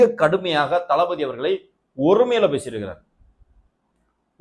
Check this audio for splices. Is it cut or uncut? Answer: uncut